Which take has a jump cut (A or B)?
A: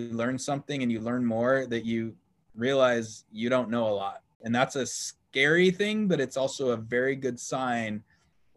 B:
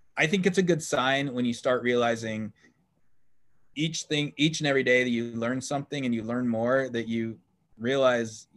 A